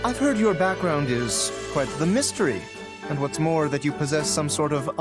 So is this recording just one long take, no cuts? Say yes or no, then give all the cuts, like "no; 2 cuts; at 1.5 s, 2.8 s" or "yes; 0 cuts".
yes; 0 cuts